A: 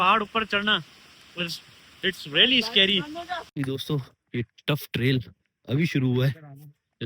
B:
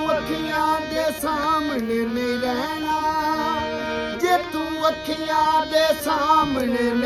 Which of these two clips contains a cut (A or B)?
A